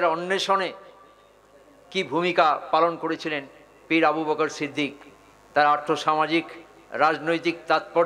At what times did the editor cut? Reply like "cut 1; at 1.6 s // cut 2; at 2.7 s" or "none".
none